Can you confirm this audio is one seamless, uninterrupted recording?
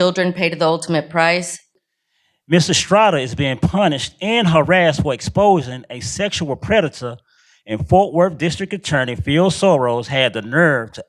no; 1 cut; at 1.6 s

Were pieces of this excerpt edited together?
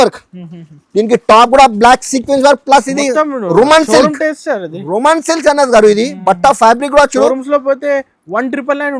no; 0 cuts

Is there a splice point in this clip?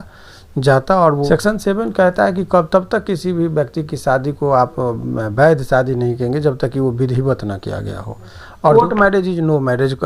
yes; 2 cuts; at 1.3 s, 8.7 s

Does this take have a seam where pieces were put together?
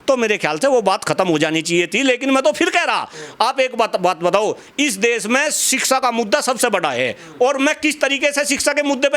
no; 0 cuts

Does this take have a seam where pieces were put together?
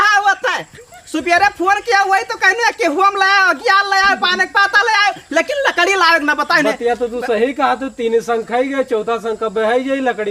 no; 0 cuts

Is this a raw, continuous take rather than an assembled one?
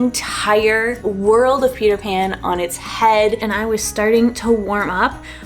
no; 2 cuts; at 1.0 s, 3.5 s

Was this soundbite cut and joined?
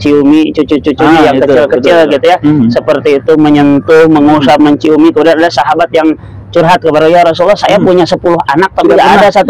no; 0 cuts

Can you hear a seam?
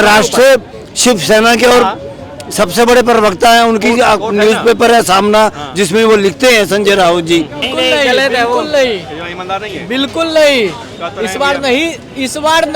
yes; 1 cut; at 7.6 s

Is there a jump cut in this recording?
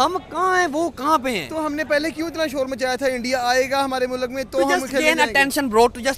no; 0 cuts

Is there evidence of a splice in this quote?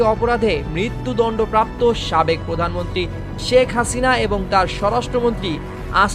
no; 0 cuts

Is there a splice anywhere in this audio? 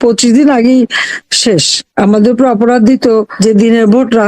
yes; 2 cuts; at 1.8 s, 3.3 s

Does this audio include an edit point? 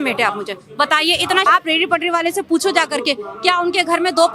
yes; 1 cut; at 1.5 s

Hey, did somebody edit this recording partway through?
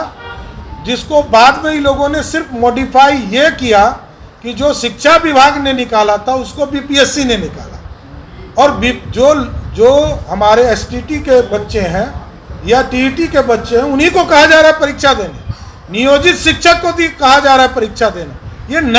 no; 0 cuts

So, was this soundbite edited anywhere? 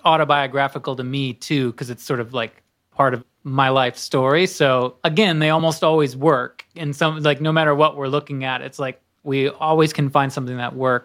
yes; 2 cuts; at 3.3 s, 4.9 s

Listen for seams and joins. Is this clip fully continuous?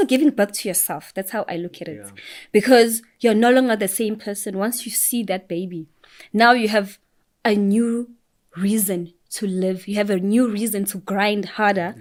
yes; 0 cuts

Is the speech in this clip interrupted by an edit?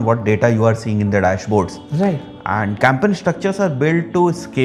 no; 0 cuts

